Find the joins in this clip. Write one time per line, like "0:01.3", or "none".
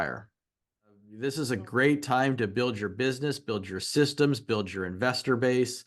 0:01.1